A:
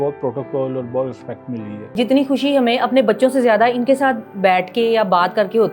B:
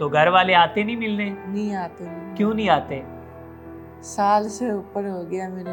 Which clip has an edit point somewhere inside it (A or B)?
A